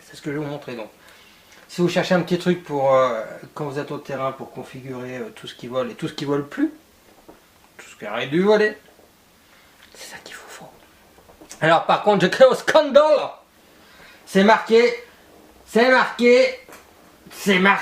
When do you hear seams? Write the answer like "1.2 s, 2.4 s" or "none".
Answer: none

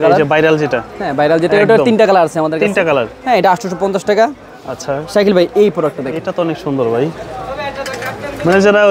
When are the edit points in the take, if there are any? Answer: none

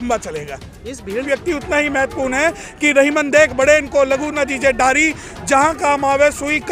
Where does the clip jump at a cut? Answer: 1.3 s

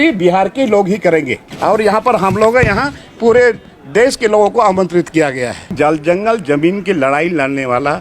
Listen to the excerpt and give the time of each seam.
1.4 s, 5.7 s

